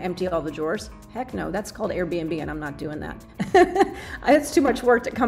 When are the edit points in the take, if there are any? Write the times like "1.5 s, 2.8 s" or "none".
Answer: none